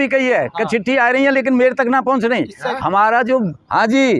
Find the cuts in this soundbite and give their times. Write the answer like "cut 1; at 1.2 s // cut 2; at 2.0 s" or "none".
none